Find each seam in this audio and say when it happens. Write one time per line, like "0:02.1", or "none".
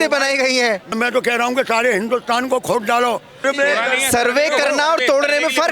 0:00.9
0:03.4